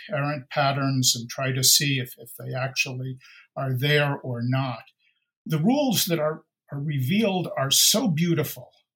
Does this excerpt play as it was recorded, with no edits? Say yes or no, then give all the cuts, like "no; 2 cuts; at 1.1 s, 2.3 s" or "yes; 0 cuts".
no; 1 cut; at 5.5 s